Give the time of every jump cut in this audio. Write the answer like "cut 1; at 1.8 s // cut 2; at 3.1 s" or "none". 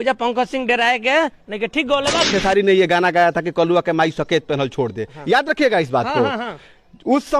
cut 1; at 2.3 s